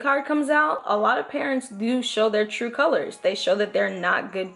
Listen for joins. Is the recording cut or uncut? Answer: uncut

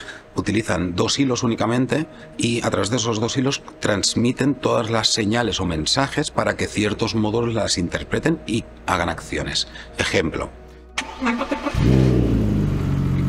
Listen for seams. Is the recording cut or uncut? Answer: cut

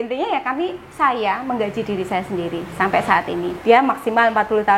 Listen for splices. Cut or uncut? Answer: cut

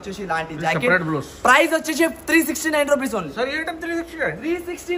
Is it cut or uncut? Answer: uncut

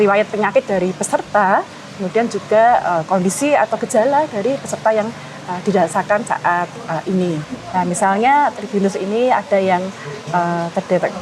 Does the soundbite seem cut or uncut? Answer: cut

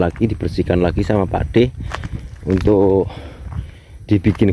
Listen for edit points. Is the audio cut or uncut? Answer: uncut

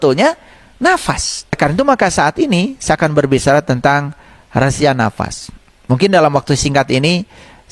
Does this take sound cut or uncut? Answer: cut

